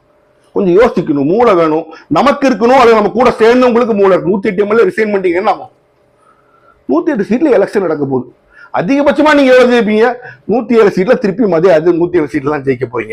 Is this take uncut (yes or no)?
yes